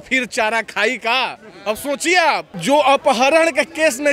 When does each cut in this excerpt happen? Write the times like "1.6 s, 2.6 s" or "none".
2.5 s